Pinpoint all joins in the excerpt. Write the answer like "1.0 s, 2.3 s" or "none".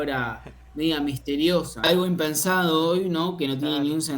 1.8 s